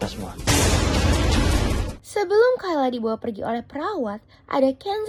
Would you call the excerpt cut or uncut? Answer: uncut